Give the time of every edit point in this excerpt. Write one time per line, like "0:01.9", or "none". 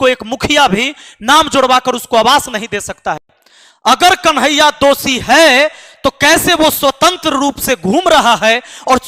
0:03.4